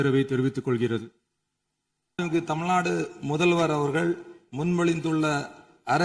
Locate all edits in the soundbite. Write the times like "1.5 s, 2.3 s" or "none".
2.2 s